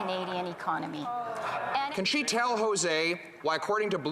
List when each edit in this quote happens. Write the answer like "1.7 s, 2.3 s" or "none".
1.9 s